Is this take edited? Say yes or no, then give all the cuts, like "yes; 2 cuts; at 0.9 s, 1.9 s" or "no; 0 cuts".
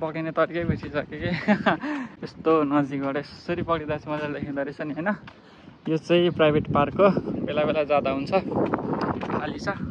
no; 0 cuts